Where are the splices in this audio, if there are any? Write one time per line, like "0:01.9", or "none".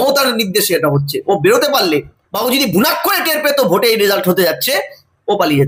none